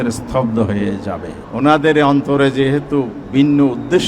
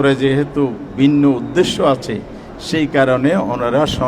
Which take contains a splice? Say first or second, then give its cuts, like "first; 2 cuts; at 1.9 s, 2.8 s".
first; 1 cut; at 1.4 s